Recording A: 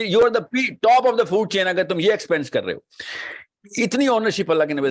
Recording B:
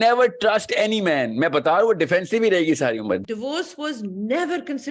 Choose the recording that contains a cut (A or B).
B